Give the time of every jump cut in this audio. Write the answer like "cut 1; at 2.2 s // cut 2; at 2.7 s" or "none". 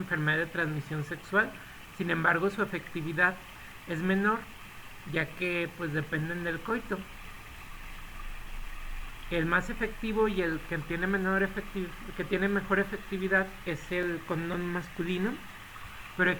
cut 1; at 2.4 s

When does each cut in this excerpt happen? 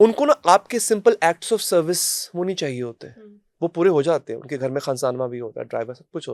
none

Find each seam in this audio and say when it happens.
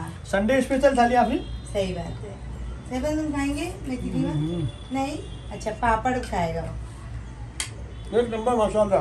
none

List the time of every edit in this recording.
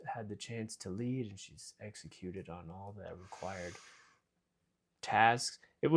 none

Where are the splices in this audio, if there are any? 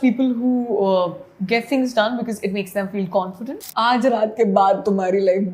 cut 1; at 3.6 s

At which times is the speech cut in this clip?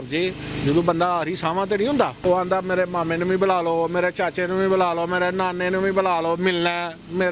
cut 1; at 2.2 s

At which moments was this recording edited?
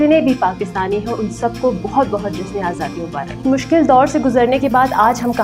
cut 1; at 3.4 s

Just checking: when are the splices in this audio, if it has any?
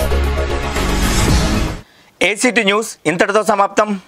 none

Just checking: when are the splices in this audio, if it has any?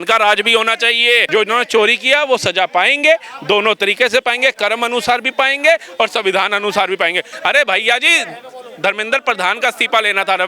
cut 1; at 1.2 s // cut 2; at 7.3 s

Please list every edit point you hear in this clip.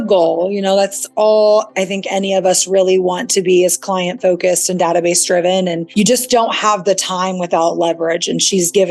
cut 1; at 5.8 s

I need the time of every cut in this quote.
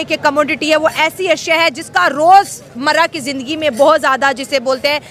none

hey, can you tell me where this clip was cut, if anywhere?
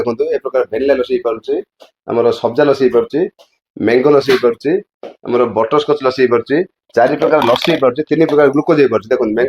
none

